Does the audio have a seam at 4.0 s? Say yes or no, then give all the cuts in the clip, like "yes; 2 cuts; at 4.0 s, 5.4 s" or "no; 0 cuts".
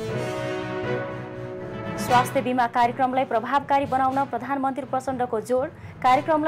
no; 1 cut; at 1.7 s